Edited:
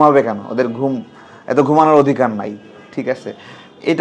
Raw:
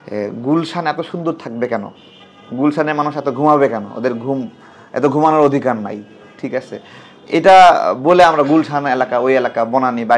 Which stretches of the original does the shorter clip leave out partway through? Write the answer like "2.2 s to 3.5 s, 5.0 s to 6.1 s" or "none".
none